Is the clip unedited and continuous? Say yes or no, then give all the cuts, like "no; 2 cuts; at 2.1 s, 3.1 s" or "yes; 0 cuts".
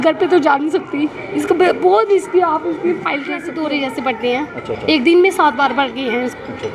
no; 1 cut; at 3.5 s